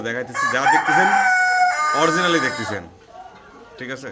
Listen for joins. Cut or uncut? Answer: uncut